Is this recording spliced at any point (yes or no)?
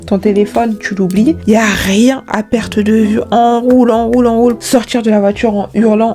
yes